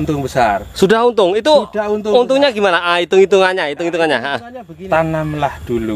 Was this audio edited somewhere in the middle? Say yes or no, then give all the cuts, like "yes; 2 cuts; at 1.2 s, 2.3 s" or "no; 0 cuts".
yes; 1 cut; at 4.8 s